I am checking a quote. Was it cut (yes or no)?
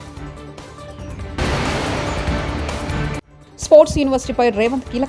yes